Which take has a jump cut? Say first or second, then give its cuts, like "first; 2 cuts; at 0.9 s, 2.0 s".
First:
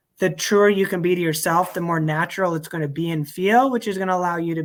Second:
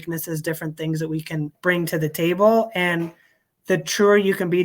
second; 1 cut; at 1.6 s